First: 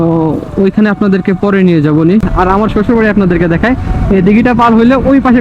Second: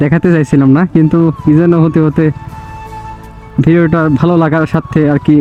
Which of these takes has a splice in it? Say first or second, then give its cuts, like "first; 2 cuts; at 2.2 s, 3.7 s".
first; 1 cut; at 2.3 s